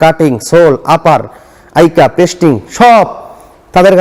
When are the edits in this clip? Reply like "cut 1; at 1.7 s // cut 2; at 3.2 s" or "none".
none